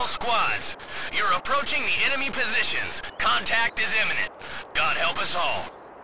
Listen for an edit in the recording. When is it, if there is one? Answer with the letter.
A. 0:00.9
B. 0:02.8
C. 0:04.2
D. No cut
D